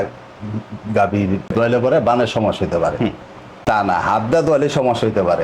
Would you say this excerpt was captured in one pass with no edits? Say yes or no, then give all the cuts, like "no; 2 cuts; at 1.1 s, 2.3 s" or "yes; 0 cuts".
no; 1 cut; at 1.5 s